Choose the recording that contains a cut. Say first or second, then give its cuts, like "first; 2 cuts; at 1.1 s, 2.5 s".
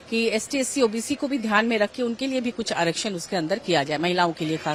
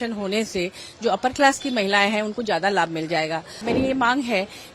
second; 1 cut; at 3.7 s